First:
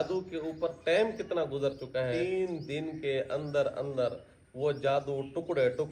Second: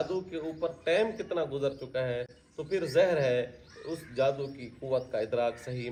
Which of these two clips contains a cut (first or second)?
first